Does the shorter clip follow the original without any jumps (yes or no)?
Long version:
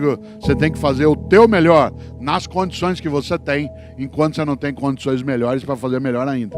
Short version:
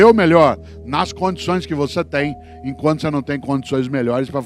yes